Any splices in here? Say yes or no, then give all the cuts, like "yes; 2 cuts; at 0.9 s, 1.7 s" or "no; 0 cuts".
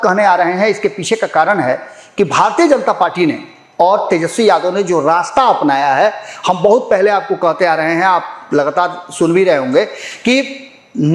no; 0 cuts